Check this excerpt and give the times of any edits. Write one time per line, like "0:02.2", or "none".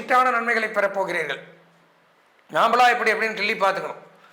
none